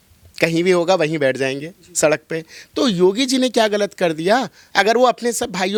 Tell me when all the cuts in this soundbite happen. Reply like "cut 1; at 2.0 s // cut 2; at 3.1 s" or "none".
none